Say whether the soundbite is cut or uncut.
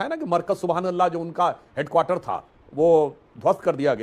uncut